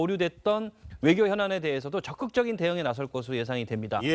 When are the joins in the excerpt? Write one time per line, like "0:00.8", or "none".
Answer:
none